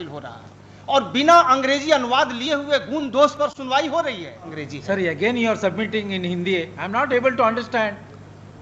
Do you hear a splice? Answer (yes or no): yes